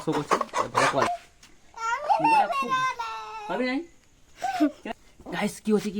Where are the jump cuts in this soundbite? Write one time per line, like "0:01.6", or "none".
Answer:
0:01.1
0:04.9